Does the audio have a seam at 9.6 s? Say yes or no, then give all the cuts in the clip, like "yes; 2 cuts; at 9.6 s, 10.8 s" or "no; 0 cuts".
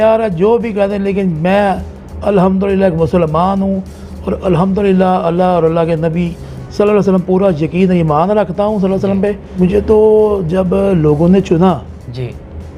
yes; 1 cut; at 9.6 s